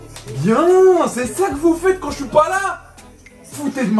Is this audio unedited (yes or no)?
yes